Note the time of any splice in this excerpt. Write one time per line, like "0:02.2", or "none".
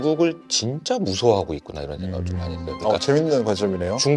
none